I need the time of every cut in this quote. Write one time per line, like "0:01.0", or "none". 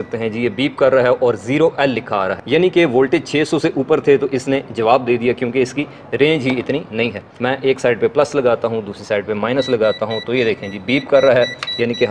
0:02.4
0:07.3